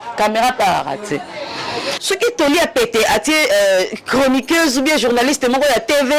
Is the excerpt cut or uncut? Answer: cut